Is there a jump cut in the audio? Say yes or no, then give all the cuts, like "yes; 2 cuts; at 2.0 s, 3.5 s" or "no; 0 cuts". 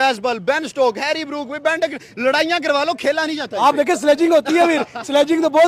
no; 0 cuts